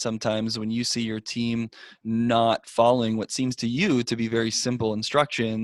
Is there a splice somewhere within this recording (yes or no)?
no